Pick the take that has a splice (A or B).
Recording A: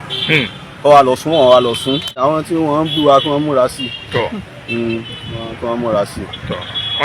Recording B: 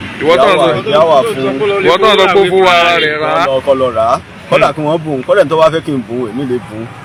A